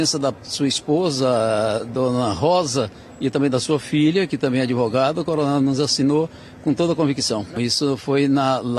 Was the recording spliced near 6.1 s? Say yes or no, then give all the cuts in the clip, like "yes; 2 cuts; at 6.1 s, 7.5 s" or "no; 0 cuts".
no; 1 cut; at 7.5 s